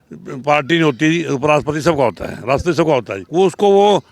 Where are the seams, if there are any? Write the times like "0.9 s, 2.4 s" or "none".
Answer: 3.2 s